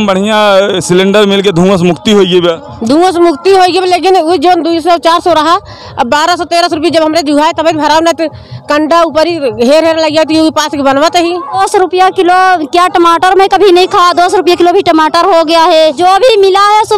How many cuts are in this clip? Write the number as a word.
two